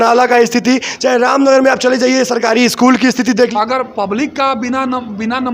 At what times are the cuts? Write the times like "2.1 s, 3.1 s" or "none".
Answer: 3.5 s